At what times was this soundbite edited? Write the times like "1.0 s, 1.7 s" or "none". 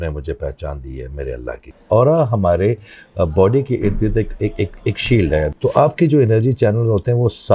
1.8 s, 5.0 s